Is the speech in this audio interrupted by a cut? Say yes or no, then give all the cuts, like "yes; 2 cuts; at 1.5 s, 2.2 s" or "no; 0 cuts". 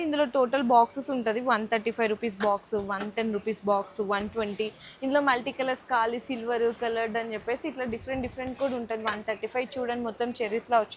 no; 0 cuts